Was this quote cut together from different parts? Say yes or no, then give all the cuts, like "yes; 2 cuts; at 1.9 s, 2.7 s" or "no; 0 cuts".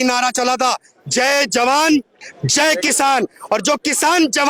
no; 0 cuts